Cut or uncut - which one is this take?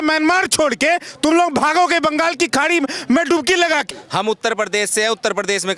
cut